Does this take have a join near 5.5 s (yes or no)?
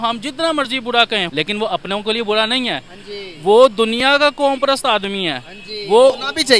no